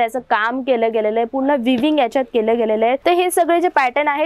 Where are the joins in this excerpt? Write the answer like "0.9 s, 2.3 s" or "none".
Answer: 3.0 s